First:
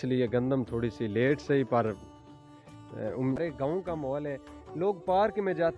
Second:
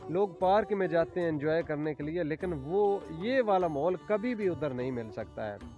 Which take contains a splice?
first; 1 cut; at 3.4 s

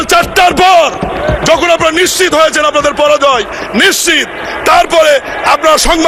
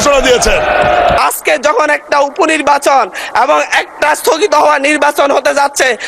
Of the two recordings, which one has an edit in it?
second; 1 cut; at 1.2 s

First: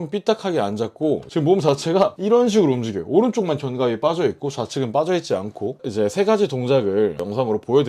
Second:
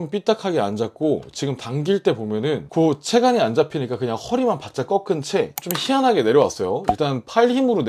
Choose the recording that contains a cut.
first; 2 cuts; at 1.3 s, 5.8 s

